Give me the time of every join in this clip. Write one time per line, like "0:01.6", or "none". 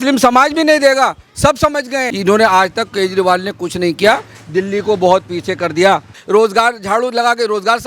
0:02.1
0:06.2